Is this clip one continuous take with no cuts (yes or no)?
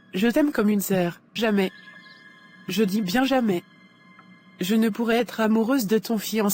no